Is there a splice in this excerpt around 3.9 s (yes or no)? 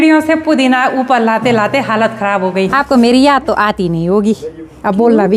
no